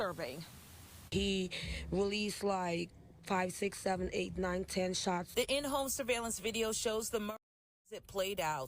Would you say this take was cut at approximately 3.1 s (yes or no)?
no